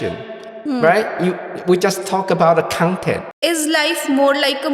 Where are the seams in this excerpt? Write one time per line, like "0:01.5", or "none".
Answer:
0:03.2